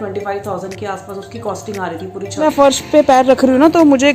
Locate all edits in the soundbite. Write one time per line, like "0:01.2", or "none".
0:02.4